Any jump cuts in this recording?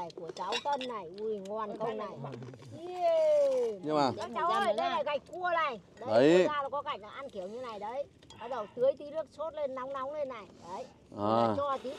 yes; 1 cut; at 3.9 s

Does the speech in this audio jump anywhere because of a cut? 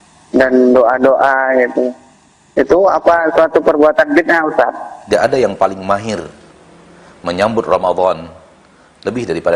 yes; 1 cut; at 5.0 s

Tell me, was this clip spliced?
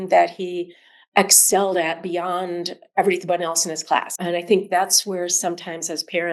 yes; 1 cut; at 4.1 s

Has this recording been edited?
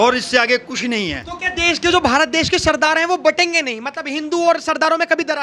no; 0 cuts

